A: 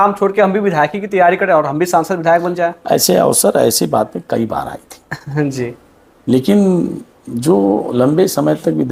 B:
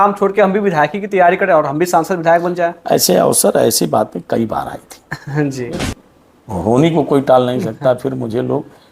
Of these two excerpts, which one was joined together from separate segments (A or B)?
B